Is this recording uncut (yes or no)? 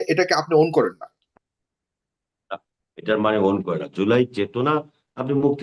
yes